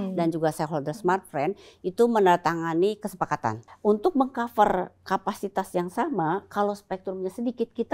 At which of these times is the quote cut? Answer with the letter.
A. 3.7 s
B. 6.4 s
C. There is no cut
A